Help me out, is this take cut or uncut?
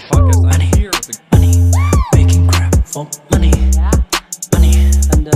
uncut